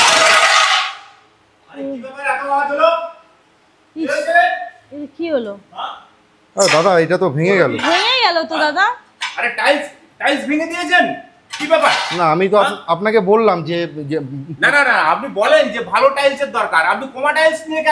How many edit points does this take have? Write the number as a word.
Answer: zero